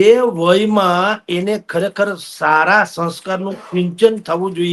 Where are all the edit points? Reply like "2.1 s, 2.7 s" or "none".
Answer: none